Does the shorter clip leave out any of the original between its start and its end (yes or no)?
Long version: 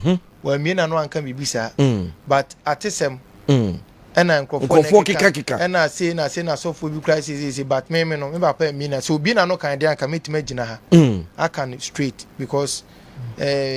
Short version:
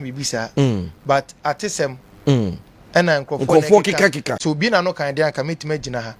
yes